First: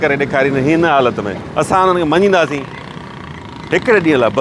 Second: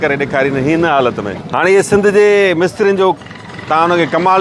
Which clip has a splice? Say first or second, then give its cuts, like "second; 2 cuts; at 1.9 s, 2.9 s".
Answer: second; 1 cut; at 1.3 s